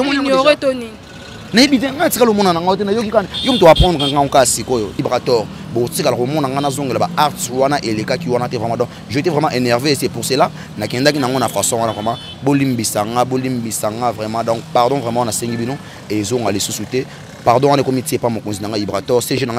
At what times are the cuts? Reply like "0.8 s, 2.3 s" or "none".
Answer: 4.9 s